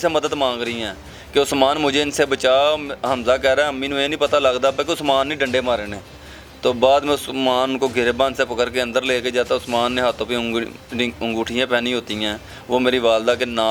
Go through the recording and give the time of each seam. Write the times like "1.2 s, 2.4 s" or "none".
none

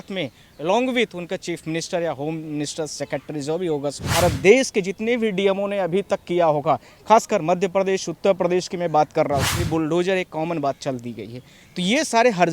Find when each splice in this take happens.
4.1 s, 9.5 s

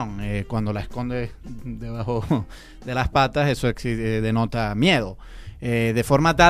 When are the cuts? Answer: 3.2 s

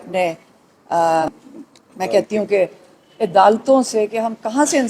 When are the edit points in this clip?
1.3 s

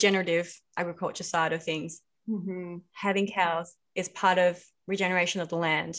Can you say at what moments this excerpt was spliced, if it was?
none

